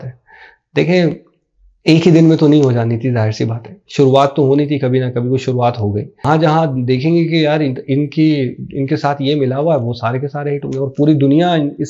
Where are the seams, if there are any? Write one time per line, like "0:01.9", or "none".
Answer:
0:06.2

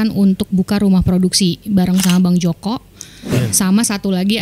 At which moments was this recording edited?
0:03.3

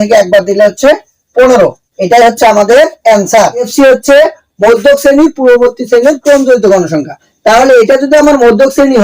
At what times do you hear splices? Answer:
0:03.7

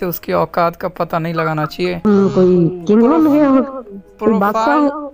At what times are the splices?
0:02.0

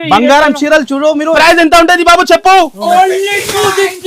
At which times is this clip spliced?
0:01.3

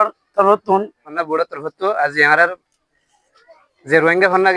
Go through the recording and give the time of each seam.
0:01.1

